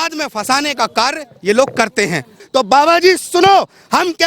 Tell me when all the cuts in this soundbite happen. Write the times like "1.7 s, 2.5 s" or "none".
2.4 s